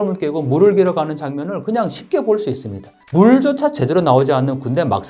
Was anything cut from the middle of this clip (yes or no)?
no